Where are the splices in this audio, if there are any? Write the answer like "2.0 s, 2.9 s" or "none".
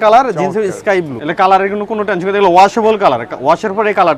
1.2 s